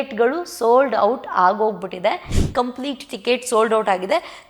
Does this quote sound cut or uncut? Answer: cut